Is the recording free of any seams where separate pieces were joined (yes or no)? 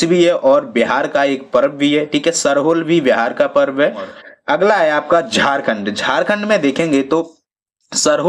no